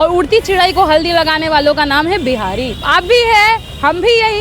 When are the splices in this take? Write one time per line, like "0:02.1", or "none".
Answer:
0:02.8